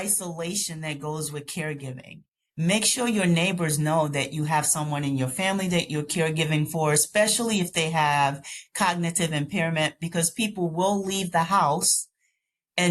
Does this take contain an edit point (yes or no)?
no